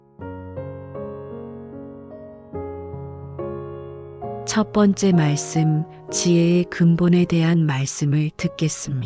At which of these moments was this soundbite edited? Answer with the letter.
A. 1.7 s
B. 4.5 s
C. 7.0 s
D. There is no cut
B